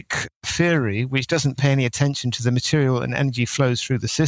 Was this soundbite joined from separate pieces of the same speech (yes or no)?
no